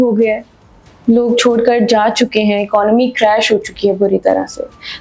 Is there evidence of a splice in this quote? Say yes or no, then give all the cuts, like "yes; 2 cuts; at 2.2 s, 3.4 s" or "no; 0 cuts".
no; 0 cuts